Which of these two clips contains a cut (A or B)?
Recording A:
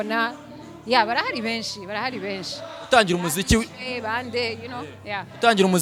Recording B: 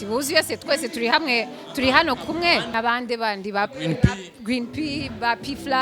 B